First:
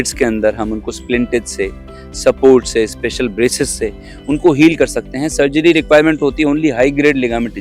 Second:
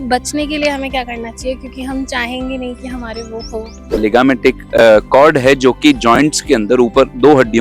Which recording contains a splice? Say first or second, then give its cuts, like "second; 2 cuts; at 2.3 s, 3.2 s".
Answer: second; 1 cut; at 4.0 s